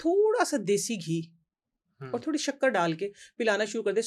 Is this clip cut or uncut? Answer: uncut